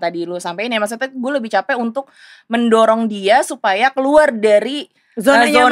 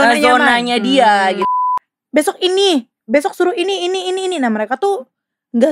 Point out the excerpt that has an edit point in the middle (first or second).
second